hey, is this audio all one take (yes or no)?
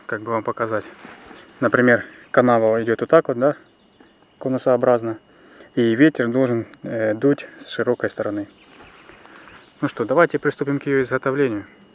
no